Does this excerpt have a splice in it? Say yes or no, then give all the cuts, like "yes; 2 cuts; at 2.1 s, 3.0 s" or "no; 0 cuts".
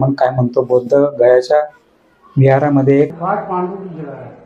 yes; 1 cut; at 3.2 s